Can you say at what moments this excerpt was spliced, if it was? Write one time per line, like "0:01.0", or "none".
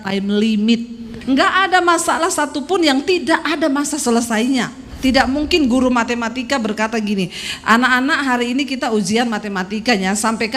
0:01.1
0:04.9